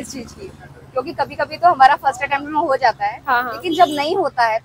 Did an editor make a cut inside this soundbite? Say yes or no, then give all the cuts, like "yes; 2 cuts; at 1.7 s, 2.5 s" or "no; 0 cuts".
no; 0 cuts